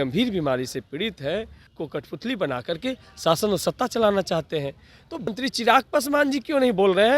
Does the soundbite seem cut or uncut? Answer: cut